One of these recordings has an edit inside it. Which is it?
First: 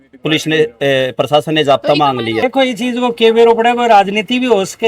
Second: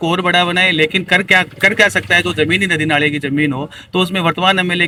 first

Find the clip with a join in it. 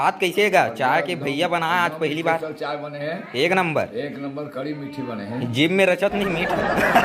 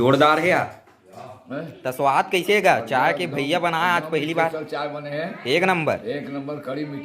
second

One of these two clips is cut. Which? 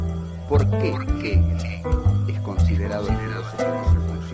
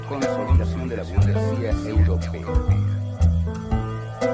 first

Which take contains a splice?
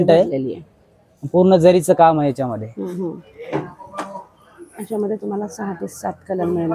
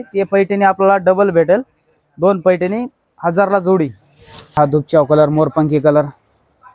second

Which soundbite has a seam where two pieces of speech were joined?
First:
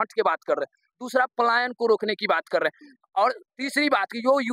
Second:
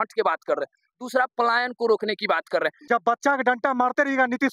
second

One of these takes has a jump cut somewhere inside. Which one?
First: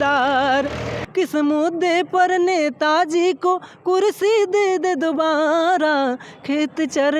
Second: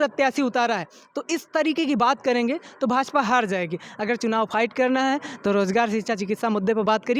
first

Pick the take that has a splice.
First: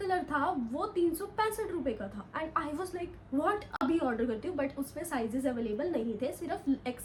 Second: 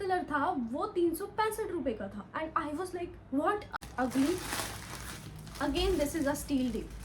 second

